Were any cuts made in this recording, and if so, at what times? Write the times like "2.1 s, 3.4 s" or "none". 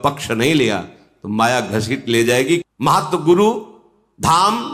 2.6 s